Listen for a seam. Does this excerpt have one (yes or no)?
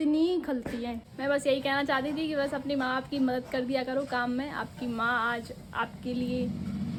no